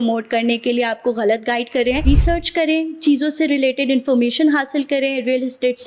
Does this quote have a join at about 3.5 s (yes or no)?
no